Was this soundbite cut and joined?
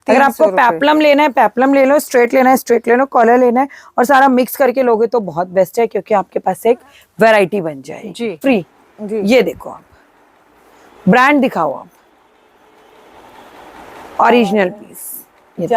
yes; 1 cut; at 8.4 s

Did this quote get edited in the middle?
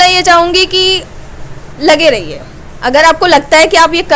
no; 0 cuts

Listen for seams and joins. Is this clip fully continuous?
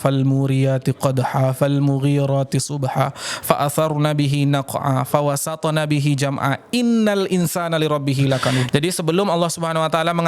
no; 1 cut; at 8.7 s

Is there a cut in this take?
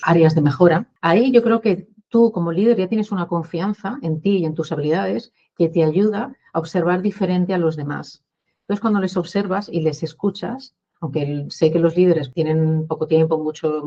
yes; 2 cuts; at 0.9 s, 12.3 s

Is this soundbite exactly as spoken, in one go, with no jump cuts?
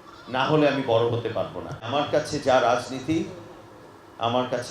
no; 1 cut; at 1.9 s

